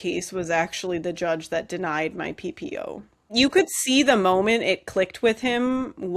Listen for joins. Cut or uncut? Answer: cut